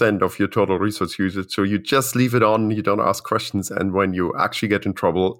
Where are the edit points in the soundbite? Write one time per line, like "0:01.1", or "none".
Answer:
none